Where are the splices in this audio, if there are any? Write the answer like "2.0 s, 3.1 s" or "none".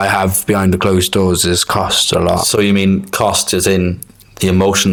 none

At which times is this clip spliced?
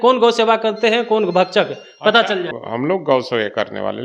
2.5 s

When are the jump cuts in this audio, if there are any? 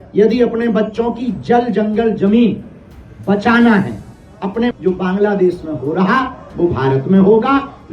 4.7 s

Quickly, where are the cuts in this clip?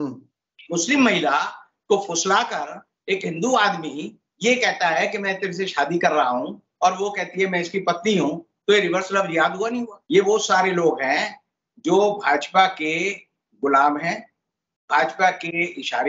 9.9 s

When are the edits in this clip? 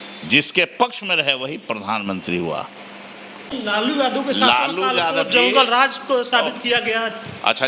3.5 s

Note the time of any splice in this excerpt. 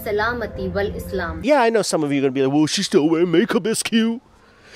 1.4 s

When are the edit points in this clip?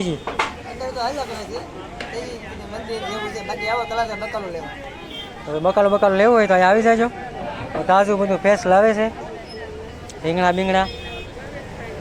none

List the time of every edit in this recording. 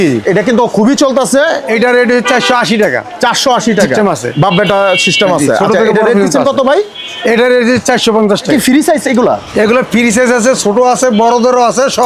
1.6 s, 3.9 s, 8.5 s

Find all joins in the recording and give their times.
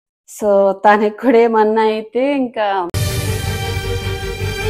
2.9 s

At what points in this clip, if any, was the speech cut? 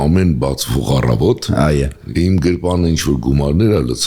2.0 s

